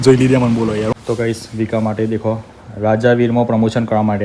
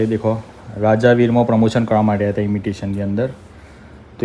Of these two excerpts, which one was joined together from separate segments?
first; 1 cut; at 0.9 s

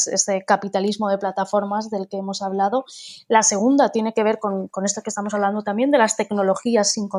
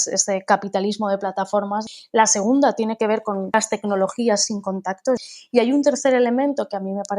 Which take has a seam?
second; 3 cuts; at 1.9 s, 3.5 s, 5.2 s

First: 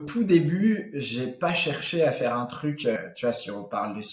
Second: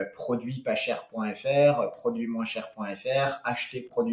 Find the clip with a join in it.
first; 1 cut; at 3.0 s

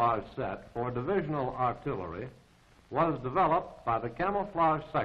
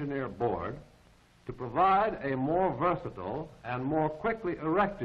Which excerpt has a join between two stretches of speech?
second; 1 cut; at 2.9 s

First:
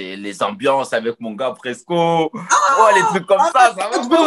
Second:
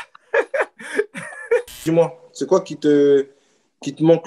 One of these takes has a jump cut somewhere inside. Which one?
second; 1 cut; at 1.8 s

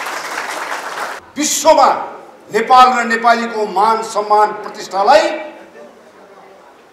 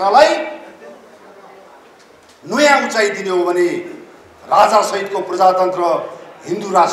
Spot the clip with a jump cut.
first; 1 cut; at 1.1 s

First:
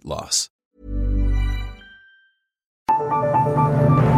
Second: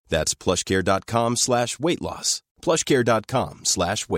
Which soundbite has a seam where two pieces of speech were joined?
first; 1 cut; at 2.7 s

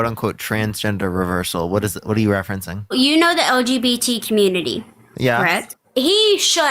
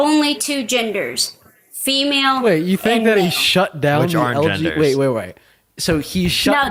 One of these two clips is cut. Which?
first; 2 cuts; at 2.9 s, 5.8 s

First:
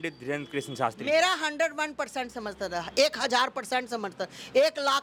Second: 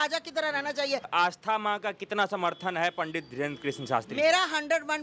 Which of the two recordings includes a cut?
second; 1 cut; at 1.1 s

